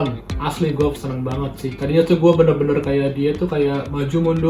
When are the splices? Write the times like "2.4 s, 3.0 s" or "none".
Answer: 1.7 s